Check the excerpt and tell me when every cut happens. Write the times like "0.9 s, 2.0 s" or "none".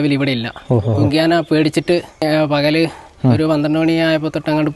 2.2 s